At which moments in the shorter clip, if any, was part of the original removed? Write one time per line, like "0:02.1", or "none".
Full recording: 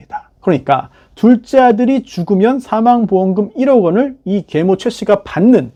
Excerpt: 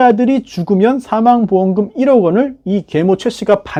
none